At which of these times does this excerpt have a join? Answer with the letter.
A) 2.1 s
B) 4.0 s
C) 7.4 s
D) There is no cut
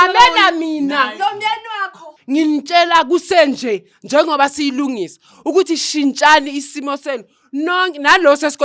A